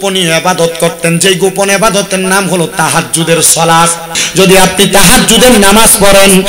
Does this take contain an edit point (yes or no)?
yes